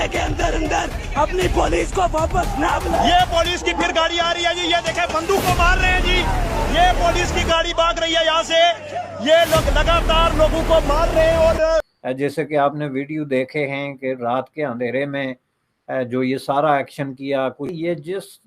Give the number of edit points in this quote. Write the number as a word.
two